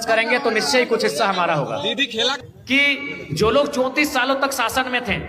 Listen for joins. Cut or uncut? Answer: cut